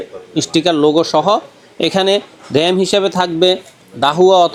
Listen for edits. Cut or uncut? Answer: uncut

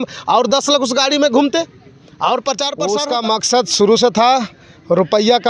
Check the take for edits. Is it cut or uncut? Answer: cut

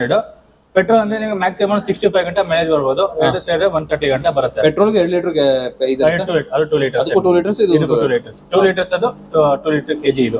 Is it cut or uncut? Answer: uncut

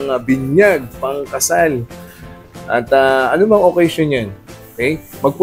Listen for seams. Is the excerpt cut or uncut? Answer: uncut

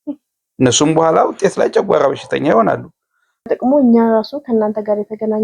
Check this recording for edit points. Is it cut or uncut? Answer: cut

